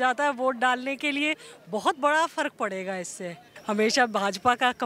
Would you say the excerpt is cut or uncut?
cut